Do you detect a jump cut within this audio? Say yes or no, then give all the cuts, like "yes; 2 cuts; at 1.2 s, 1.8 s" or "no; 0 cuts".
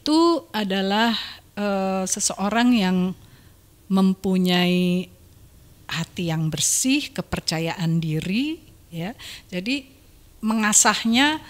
no; 0 cuts